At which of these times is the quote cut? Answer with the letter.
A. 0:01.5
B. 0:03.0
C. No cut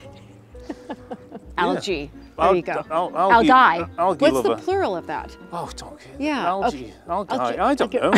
A